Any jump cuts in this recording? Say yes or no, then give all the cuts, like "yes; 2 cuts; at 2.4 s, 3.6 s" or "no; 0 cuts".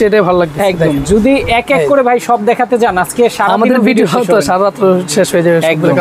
no; 0 cuts